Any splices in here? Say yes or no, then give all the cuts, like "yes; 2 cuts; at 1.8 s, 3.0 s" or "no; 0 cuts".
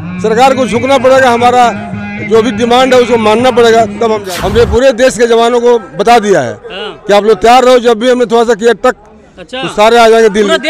yes; 1 cut; at 4.3 s